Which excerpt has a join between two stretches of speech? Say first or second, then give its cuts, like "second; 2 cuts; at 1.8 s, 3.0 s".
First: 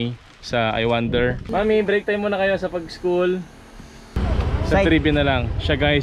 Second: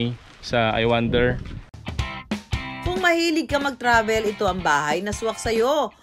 first; 2 cuts; at 1.4 s, 4.1 s